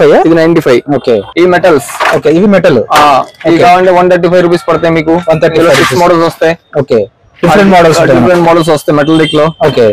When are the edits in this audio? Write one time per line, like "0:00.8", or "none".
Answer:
0:01.3